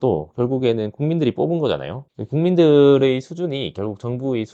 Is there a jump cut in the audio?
no; 0 cuts

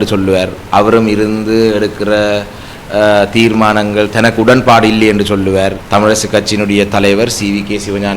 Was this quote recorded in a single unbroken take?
no; 1 cut; at 5.8 s

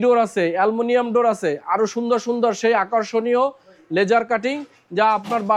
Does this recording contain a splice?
no; 0 cuts

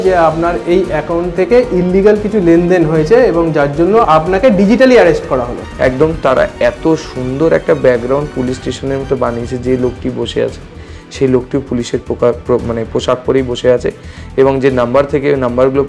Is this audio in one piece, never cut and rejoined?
no; 2 cuts; at 4.1 s, 5.6 s

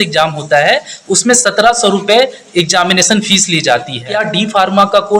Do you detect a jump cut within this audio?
yes; 1 cut; at 4.2 s

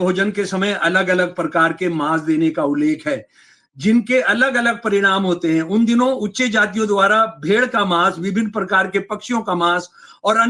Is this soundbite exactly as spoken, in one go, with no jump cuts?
yes; 0 cuts

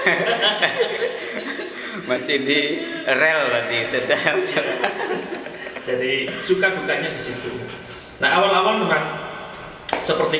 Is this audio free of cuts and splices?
yes; 0 cuts

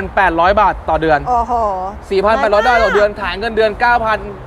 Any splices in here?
no; 0 cuts

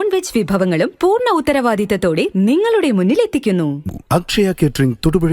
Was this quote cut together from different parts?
yes; 1 cut; at 3.8 s

